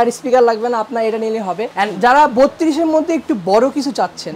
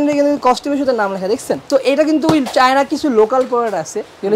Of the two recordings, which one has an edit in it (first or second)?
second